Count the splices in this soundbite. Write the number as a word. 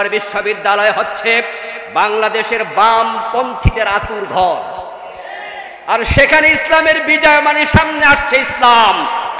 zero